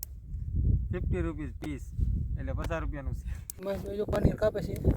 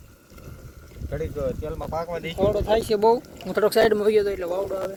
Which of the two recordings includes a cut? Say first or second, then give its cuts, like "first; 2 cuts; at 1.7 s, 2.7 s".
first; 1 cut; at 3.6 s